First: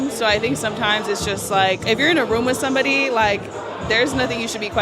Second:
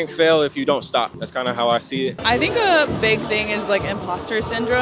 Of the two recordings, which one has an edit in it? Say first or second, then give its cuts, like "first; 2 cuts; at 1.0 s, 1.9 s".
second; 1 cut; at 2.2 s